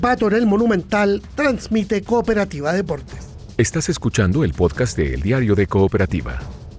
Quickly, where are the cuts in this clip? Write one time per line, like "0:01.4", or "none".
0:03.3